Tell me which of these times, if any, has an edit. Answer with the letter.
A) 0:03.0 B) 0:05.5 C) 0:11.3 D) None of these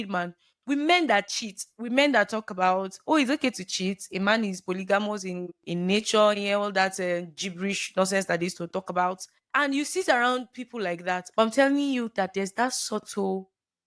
C